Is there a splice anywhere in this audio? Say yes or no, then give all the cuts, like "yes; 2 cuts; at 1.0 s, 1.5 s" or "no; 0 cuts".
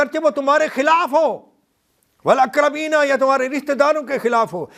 no; 0 cuts